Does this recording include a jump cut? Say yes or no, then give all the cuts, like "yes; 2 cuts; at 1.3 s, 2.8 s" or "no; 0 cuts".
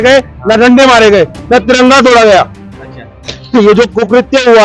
no; 0 cuts